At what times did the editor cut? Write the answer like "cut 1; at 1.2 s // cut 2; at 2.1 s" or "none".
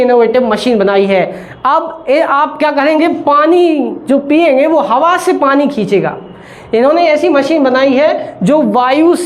none